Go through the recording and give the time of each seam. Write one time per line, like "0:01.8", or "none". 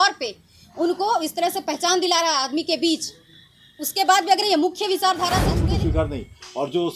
0:05.5